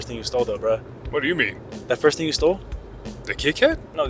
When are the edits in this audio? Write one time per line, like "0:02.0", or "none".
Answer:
0:01.0

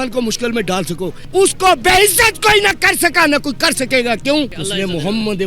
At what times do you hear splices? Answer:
0:01.2
0:04.6

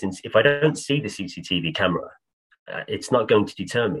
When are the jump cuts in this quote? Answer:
none

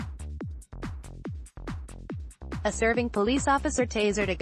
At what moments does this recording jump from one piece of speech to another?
none

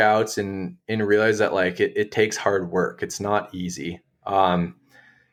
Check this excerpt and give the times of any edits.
none

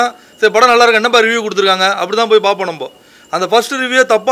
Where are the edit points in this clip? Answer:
none

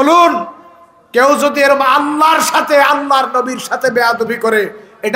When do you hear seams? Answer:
none

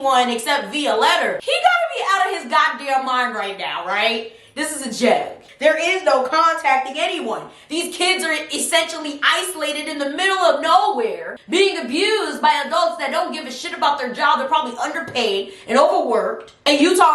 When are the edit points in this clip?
0:01.4
0:05.4
0:11.3

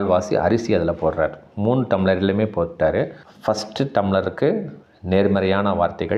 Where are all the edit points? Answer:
0:03.2

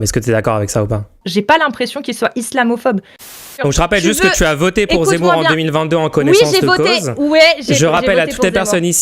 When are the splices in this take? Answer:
0:01.2
0:03.4

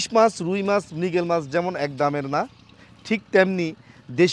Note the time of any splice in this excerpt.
none

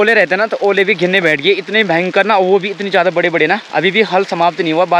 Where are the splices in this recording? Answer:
none

